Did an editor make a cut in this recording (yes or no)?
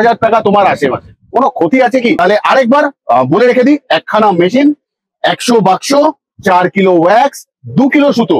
yes